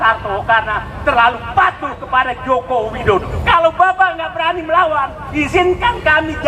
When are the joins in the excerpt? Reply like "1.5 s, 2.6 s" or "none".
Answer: 3.3 s